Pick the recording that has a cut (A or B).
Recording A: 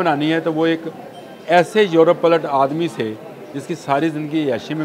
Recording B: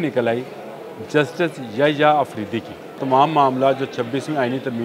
B